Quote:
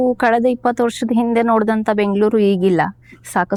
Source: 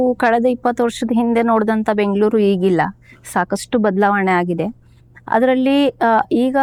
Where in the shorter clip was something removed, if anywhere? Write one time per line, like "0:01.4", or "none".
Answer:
none

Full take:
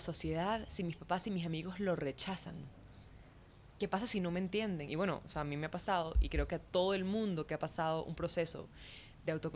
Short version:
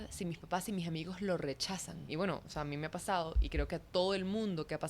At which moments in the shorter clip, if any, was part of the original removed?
0:02.1

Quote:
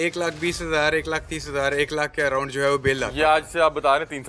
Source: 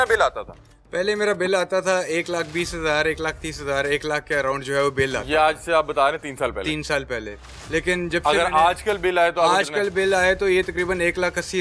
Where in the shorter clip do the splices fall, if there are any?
none

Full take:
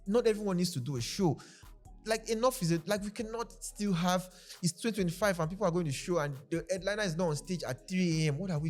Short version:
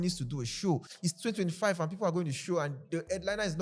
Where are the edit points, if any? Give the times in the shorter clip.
0:00.9

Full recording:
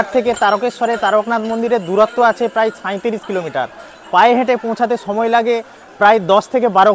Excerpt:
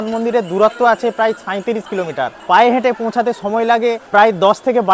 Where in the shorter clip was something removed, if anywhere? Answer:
0:02.4
0:04.0

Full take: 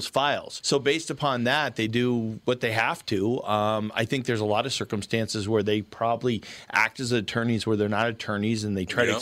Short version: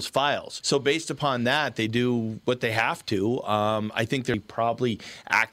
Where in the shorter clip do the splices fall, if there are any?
0:04.3

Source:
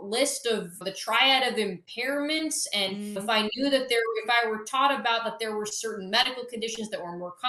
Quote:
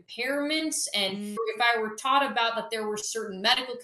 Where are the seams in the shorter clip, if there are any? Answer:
0:01.4

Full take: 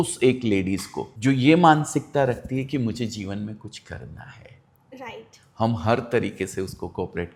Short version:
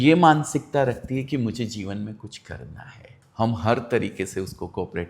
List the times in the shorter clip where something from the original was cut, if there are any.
0:03.2

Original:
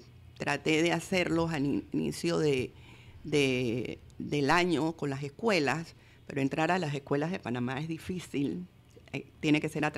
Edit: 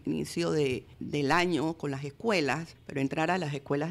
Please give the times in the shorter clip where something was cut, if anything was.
0:00.9
0:02.8

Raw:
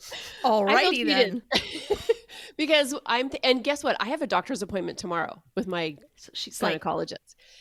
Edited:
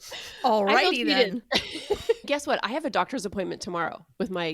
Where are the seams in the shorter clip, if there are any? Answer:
0:02.2

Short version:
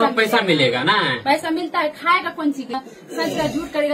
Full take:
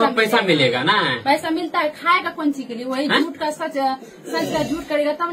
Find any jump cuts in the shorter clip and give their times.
0:02.8

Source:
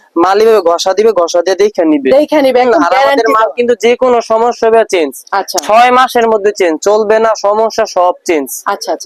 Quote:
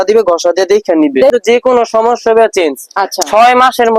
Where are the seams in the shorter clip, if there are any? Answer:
0:01.3

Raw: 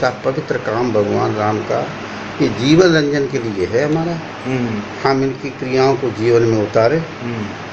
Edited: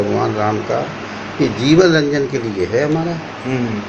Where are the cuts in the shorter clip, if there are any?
none

